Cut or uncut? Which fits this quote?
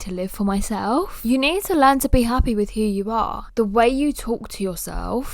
cut